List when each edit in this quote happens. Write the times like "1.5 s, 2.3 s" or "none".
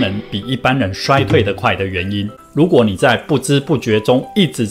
2.4 s

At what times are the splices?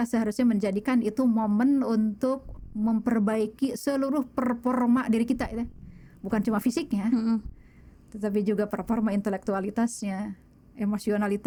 none

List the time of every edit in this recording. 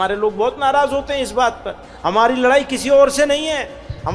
none

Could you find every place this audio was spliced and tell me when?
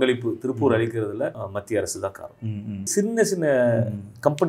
1.4 s, 2.9 s

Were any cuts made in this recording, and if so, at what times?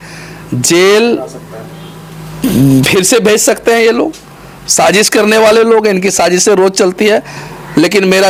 none

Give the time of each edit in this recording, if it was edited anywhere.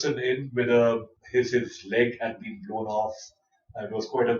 1.2 s

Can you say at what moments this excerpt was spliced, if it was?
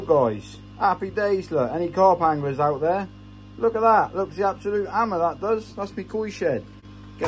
none

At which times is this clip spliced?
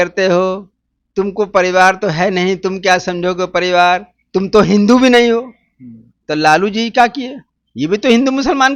none

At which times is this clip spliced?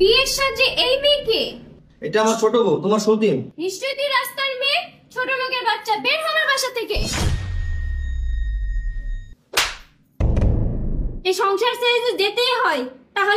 3.5 s, 11.1 s

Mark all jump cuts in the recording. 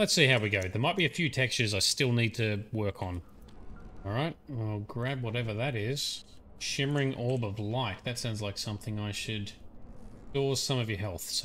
none

